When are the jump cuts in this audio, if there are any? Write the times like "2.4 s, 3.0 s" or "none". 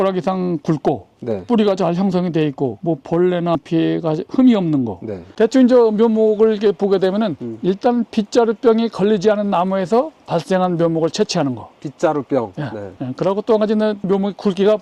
none